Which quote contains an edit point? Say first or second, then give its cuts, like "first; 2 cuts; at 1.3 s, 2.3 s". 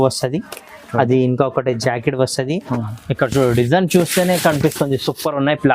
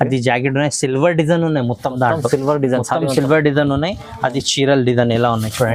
first; 1 cut; at 2.6 s